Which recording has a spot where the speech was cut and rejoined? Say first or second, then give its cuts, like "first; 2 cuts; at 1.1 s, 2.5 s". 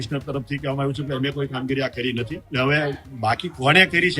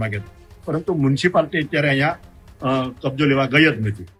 first; 1 cut; at 2.4 s